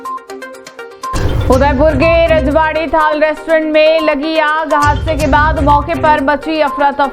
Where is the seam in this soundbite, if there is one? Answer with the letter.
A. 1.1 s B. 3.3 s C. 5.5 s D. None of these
A